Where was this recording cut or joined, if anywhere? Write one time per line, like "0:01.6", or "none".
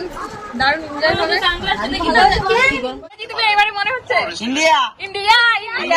0:03.3